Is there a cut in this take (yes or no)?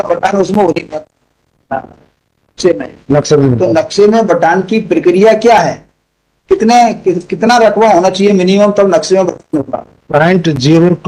no